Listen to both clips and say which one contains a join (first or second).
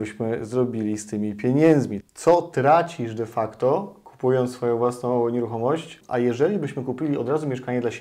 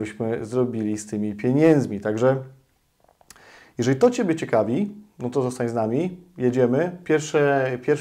first